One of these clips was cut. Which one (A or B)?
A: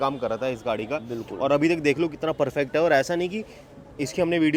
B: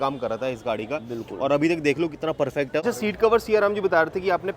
B